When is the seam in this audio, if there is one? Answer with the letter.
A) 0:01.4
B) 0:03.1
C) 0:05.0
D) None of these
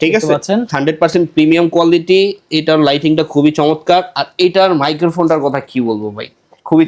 D